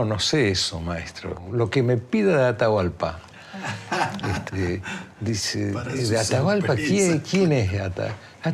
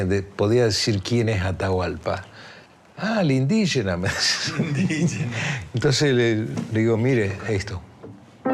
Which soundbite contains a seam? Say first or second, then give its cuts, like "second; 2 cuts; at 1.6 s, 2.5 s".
first; 1 cut; at 7.0 s